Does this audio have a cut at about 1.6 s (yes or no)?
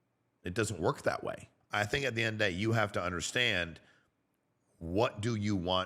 yes